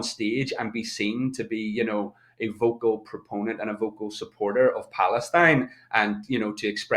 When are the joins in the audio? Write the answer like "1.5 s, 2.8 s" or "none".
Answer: none